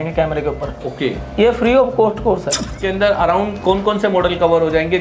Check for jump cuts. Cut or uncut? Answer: cut